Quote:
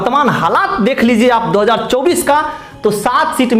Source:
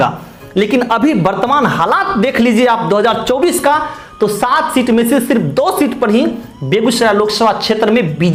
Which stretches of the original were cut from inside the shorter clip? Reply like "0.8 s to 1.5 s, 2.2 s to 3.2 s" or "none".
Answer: none